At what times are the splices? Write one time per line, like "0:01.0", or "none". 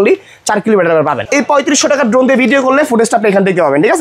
0:01.2